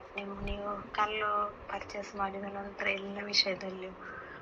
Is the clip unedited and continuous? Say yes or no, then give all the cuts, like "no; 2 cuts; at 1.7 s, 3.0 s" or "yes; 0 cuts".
yes; 0 cuts